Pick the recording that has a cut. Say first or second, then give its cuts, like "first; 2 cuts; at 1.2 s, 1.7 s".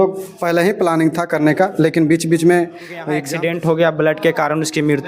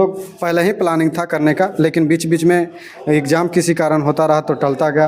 first; 1 cut; at 3.2 s